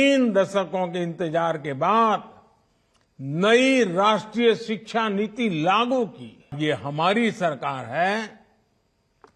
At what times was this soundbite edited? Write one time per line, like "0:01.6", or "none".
0:06.6

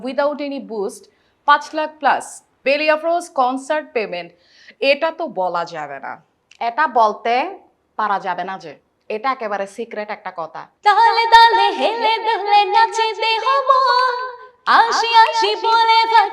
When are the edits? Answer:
0:02.6
0:10.6

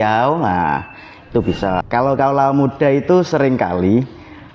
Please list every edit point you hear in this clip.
0:01.9

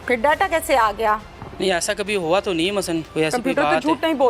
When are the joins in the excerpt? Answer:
0:01.4
0:03.1

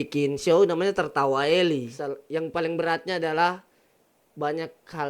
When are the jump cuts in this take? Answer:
0:01.9

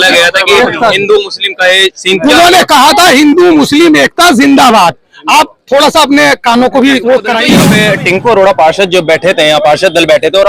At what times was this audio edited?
0:07.5

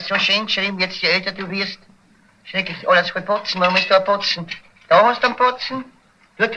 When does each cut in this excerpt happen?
0:04.7

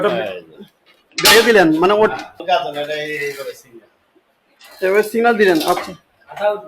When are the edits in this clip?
0:02.3

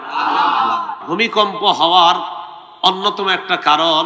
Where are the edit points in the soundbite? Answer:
0:01.0

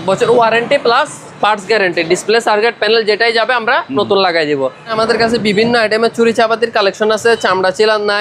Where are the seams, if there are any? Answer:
0:04.9

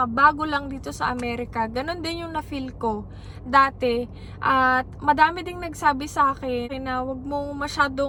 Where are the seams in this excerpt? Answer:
none

